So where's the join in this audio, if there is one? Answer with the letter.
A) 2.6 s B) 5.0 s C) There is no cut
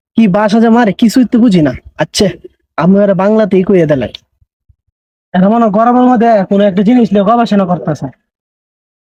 C